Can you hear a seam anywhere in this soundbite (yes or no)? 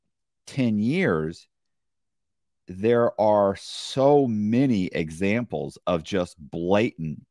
no